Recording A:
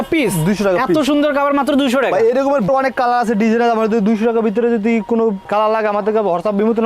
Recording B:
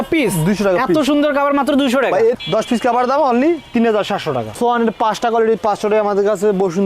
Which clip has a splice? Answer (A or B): B